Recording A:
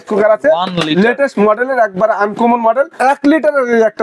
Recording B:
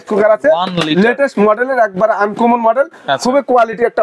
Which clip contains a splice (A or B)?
A